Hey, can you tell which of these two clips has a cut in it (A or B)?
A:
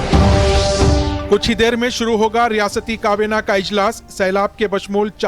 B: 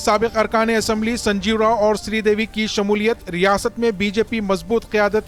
A